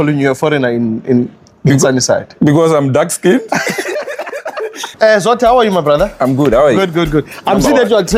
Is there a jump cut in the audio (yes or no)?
no